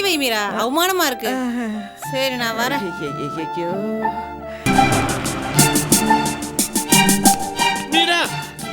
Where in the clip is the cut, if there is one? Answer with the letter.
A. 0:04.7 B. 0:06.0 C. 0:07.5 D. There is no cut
A